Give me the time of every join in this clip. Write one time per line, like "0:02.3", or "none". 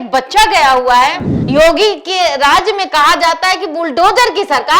0:01.3

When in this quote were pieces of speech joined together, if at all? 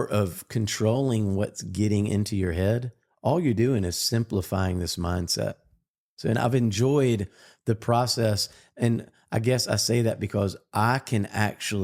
none

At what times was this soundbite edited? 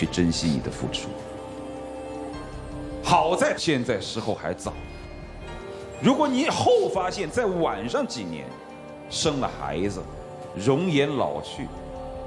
none

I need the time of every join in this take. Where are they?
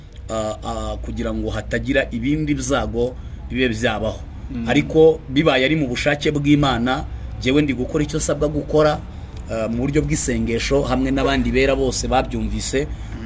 none

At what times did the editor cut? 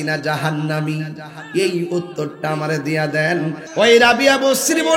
0:03.6

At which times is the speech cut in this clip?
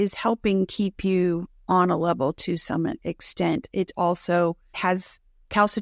0:01.5
0:04.7

